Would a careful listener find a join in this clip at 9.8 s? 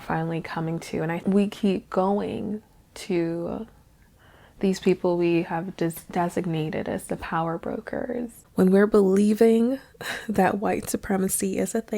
no; 2 cuts; at 1.2 s, 8.4 s

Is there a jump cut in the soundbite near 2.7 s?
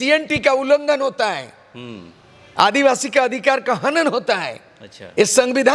no; 0 cuts

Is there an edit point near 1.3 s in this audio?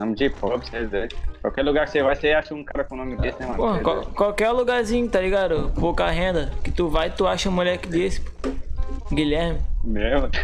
no; 0 cuts

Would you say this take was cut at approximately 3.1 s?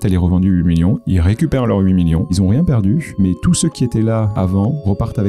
yes; 3 cuts; at 2.3 s, 3.1 s, 4.5 s

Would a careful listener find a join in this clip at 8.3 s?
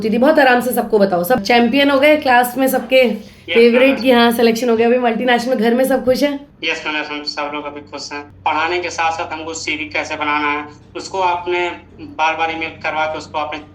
yes; 2 cuts; at 1.4 s, 8.3 s

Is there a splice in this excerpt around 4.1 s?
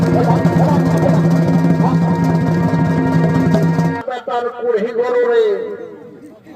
yes; 1 cut; at 4.1 s

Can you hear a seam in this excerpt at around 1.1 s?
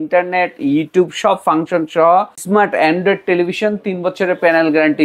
no; 1 cut; at 2.4 s

